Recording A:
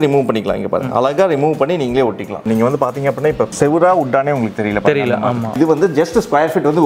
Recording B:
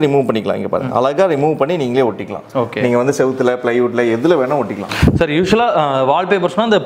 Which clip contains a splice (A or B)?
A